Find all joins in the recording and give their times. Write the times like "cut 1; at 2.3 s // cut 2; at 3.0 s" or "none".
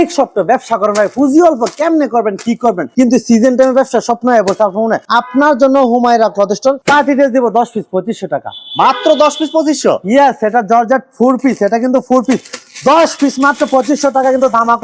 none